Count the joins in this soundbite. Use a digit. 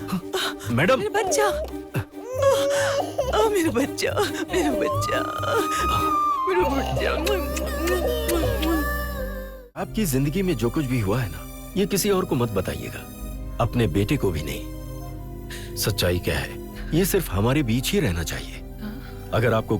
1